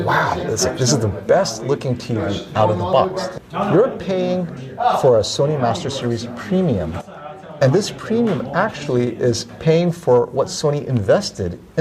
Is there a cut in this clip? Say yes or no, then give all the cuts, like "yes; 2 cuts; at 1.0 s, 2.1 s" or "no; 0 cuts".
yes; 1 cut; at 3.3 s